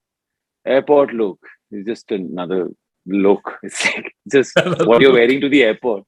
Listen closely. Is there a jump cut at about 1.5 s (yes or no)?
no